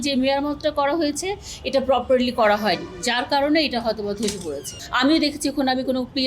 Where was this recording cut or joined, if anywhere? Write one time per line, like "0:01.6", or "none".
0:04.7

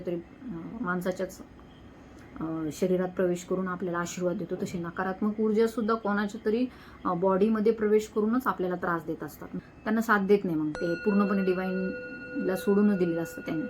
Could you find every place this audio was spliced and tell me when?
0:09.5

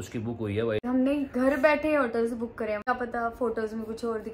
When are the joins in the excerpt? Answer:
0:00.8
0:02.8

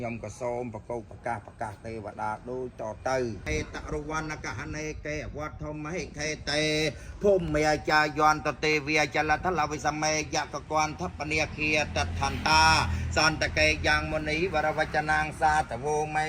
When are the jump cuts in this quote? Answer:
0:03.5

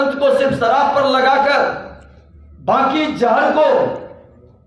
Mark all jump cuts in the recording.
none

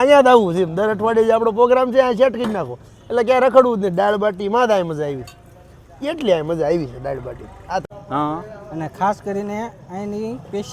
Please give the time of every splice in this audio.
0:07.8

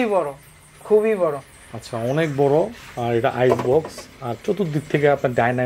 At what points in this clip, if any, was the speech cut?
none

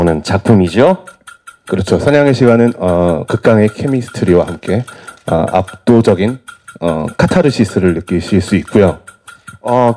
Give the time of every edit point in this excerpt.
none

